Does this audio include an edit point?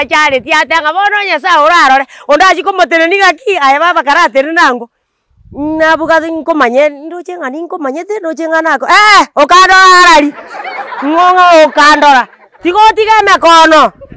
no; 0 cuts

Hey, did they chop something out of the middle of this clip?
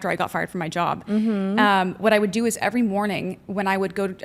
no; 0 cuts

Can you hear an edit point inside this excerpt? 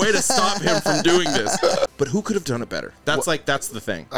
yes; 1 cut; at 1.9 s

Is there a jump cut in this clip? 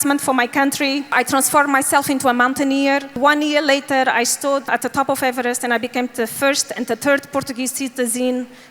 yes; 3 cuts; at 1.2 s, 3.1 s, 4.6 s

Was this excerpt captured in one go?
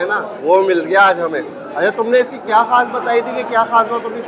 no; 1 cut; at 1.6 s

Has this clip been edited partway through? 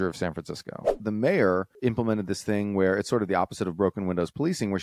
yes; 2 cuts; at 0.9 s, 1.8 s

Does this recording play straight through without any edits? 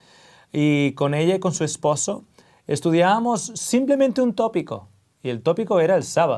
no; 1 cut; at 5.4 s

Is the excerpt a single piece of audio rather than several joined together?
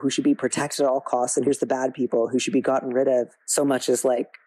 no; 1 cut; at 3.4 s

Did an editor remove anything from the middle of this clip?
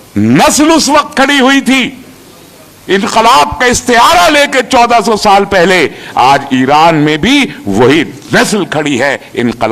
no; 0 cuts

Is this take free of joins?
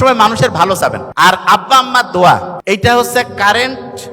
no; 2 cuts; at 1.0 s, 2.5 s

